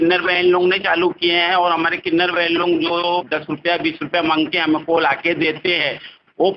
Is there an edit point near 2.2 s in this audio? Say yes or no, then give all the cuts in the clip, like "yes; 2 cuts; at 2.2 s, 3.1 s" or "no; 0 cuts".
no; 0 cuts